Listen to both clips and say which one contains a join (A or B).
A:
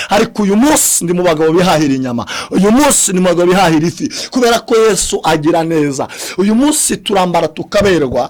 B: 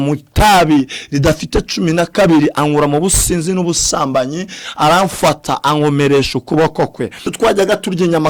B